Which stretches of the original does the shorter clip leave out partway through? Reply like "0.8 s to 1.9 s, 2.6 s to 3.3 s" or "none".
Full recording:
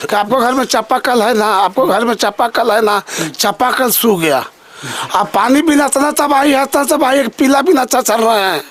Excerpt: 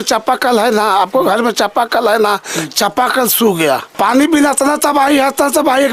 4.6 s to 5.3 s